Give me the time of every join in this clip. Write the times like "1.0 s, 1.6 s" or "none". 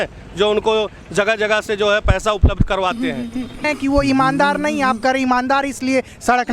3.6 s

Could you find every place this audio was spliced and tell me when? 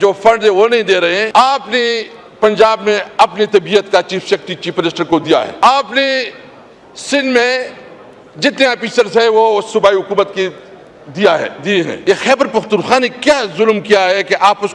1.3 s, 5.6 s, 12.0 s

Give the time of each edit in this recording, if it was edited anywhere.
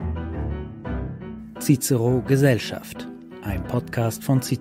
1.6 s

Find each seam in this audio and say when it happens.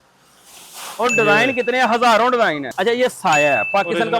2.6 s

